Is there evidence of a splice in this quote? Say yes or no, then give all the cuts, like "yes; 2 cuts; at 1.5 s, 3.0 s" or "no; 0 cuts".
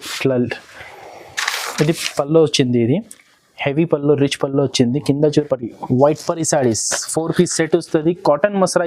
yes; 1 cut; at 5.4 s